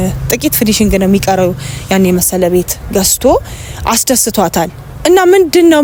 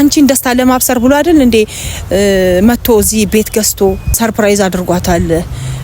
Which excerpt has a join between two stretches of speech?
second; 1 cut; at 4.2 s

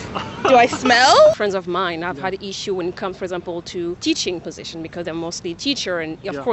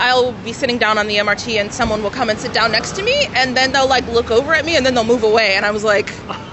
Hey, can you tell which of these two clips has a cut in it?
first; 2 cuts; at 1.4 s, 4.0 s

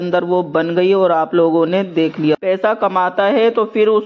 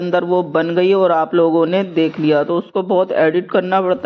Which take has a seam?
first; 1 cut; at 2.3 s

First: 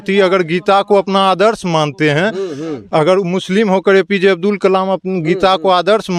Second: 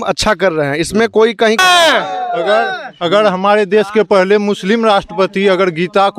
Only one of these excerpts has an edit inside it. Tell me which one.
second; 1 cut; at 1.6 s

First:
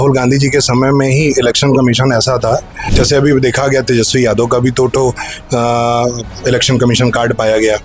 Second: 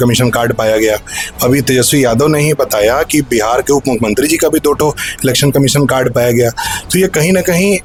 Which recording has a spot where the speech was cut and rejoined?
first; 1 cut; at 2.8 s

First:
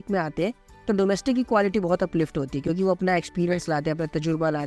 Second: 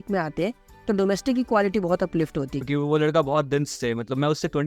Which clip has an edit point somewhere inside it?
second; 1 cut; at 2.6 s

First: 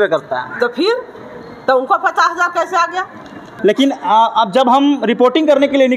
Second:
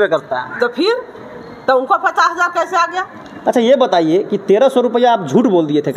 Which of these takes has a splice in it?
second; 1 cut; at 3.3 s

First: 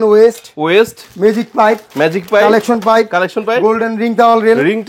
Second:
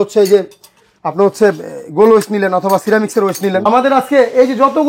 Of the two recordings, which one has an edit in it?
second; 1 cut; at 3.7 s

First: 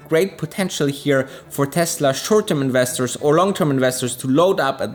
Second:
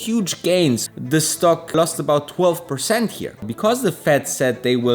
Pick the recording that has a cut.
second; 3 cuts; at 0.9 s, 1.7 s, 3.4 s

